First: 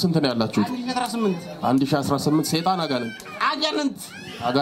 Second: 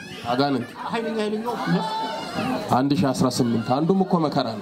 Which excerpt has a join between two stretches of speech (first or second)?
second